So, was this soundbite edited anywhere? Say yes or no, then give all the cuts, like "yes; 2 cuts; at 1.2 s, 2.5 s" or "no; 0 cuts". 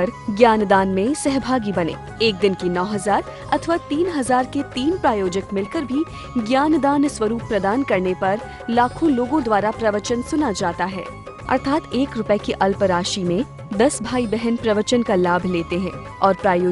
no; 0 cuts